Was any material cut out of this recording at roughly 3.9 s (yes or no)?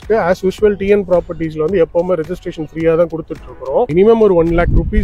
yes